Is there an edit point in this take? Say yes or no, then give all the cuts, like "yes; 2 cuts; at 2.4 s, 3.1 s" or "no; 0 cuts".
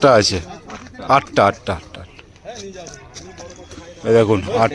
no; 0 cuts